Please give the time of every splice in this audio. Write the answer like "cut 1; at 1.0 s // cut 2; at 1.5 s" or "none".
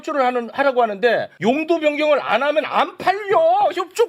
cut 1; at 1.3 s